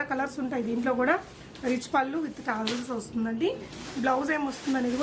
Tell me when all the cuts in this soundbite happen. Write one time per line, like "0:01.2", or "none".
none

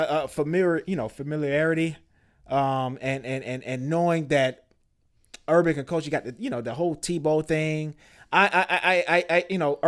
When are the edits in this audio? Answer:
none

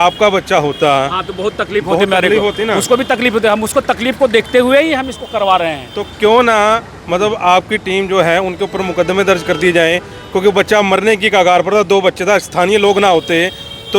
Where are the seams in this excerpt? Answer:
none

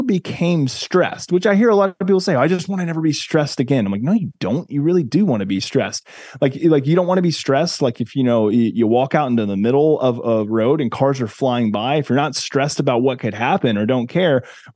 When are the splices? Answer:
none

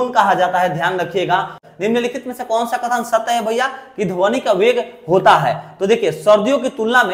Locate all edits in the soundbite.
0:01.6

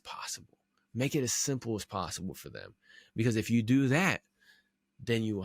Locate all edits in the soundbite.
none

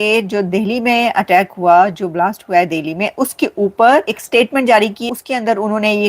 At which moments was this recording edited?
0:04.2
0:05.0

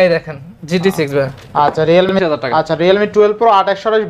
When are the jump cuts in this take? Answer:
0:02.1

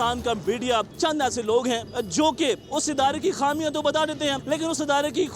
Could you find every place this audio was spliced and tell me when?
0:00.9
0:01.9
0:02.6
0:04.4

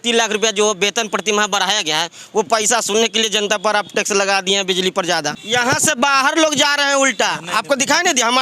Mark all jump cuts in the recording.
0:05.4

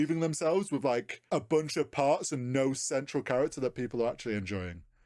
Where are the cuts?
0:01.1

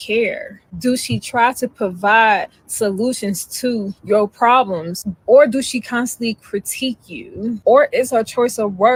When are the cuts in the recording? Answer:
none

